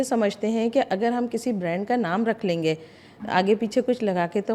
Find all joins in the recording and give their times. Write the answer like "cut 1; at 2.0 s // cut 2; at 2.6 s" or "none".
none